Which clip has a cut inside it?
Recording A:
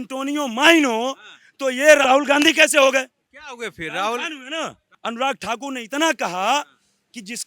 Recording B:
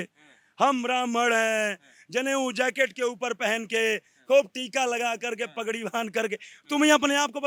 A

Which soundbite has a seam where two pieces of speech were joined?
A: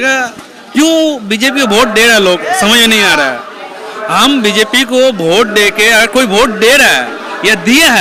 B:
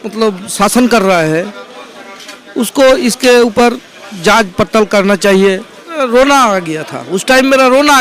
B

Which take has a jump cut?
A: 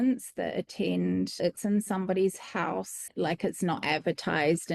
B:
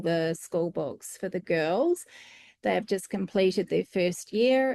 A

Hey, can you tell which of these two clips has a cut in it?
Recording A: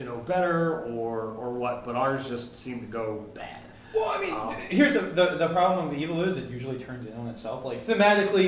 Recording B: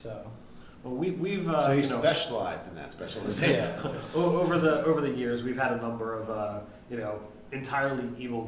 B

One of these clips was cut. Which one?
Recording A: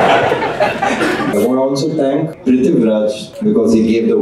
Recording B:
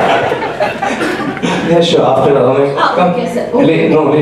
A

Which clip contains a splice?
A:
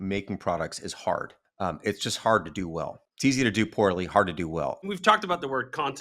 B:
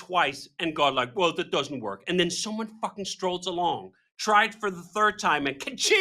A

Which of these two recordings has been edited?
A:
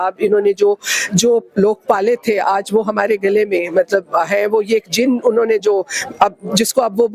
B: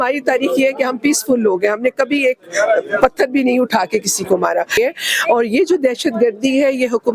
B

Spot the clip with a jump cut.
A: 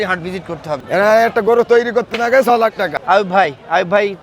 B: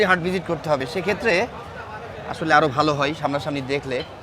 A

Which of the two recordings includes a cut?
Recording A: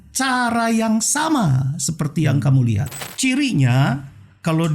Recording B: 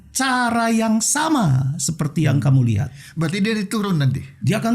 A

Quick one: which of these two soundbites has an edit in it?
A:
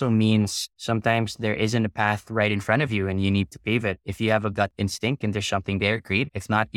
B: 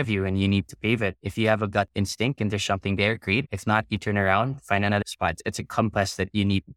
B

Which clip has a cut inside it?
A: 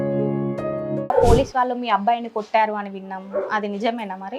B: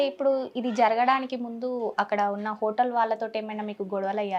A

